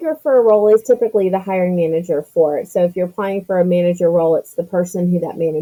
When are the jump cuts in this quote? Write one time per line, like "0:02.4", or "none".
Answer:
none